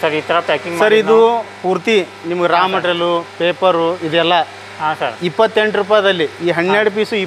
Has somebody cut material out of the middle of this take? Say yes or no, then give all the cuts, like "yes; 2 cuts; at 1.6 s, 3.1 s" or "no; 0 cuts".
no; 0 cuts